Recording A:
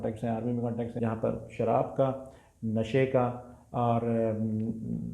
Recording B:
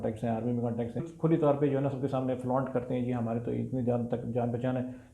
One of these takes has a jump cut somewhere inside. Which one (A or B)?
A